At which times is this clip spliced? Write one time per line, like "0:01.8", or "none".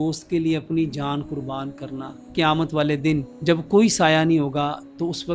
0:02.2
0:03.3